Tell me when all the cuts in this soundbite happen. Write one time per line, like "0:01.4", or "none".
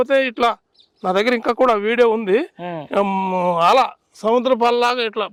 none